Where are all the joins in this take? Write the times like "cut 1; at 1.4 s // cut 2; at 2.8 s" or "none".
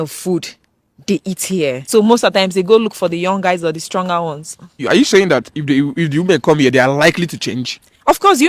cut 1; at 1.8 s // cut 2; at 4.8 s